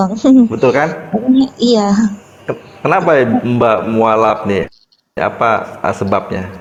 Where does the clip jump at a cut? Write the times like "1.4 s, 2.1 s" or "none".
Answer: none